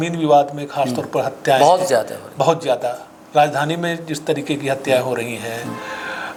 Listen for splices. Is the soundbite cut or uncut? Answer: uncut